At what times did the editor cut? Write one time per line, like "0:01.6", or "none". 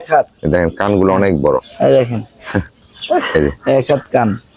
none